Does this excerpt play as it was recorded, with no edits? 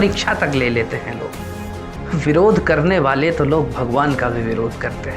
no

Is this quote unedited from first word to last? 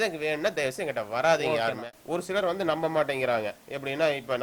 no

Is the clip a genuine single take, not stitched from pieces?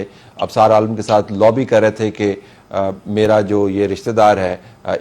yes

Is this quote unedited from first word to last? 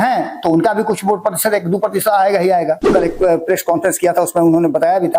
no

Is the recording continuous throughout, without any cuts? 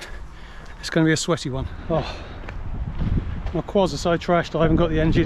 no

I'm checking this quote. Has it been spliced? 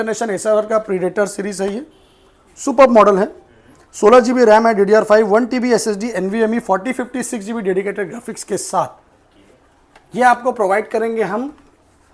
no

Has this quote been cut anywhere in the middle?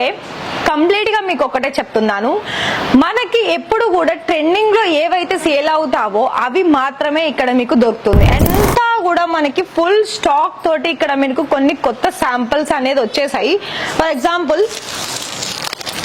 yes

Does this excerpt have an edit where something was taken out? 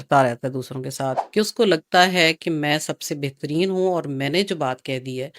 yes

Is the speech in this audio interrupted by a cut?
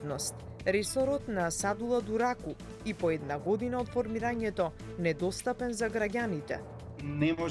no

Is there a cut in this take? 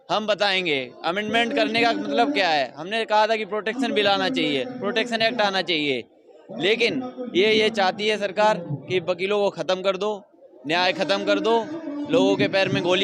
no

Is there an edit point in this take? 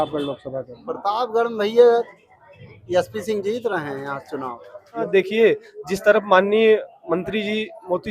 yes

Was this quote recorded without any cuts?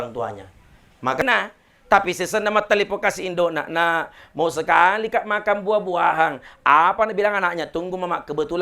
no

